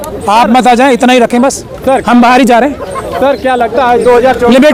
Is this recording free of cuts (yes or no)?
yes